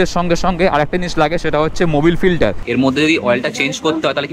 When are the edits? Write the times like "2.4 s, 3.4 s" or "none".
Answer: 2.6 s